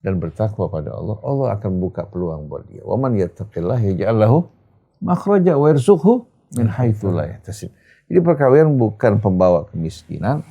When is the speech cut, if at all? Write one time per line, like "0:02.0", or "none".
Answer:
none